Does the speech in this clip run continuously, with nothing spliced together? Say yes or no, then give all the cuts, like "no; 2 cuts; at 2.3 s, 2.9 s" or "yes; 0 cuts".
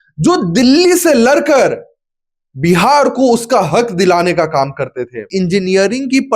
no; 1 cut; at 5.2 s